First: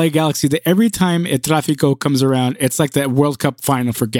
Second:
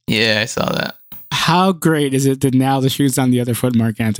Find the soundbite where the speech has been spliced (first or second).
second